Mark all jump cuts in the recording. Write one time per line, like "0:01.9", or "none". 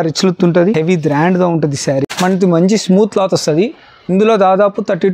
0:02.0